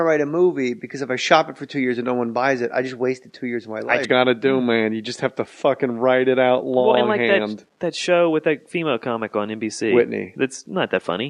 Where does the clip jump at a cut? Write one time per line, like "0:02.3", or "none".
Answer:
none